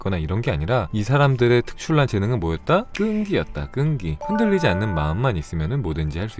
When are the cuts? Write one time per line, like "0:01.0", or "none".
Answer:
0:00.9
0:02.9
0:04.2